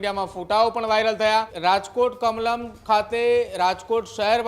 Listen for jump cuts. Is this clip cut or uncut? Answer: cut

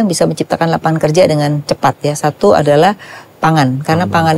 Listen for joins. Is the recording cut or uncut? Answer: uncut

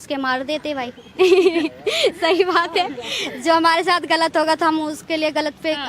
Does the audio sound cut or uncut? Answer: uncut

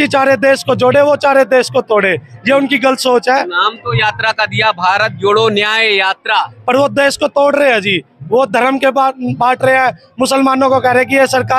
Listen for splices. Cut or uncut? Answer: uncut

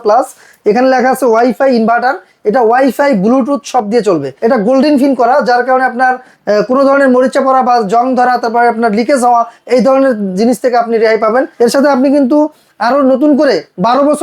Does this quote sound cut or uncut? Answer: cut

